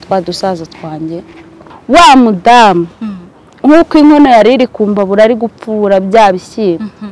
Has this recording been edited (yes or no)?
yes